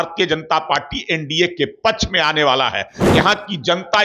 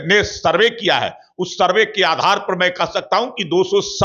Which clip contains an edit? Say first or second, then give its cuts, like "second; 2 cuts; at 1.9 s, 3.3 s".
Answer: first; 1 cut; at 3.0 s